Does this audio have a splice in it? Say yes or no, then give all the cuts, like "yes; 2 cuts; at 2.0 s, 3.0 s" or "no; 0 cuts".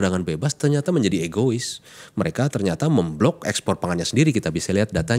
no; 0 cuts